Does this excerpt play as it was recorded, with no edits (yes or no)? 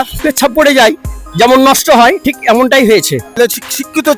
no